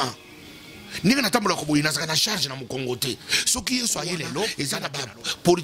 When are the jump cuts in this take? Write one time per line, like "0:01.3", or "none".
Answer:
0:04.7